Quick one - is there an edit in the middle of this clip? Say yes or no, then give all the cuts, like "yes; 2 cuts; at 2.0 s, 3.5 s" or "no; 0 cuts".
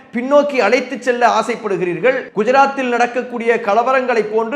yes; 1 cut; at 2.3 s